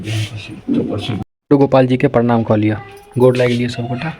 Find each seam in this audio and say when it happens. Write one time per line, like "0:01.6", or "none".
0:01.3